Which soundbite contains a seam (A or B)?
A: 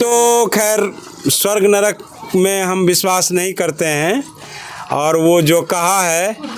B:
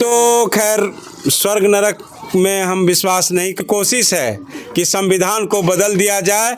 B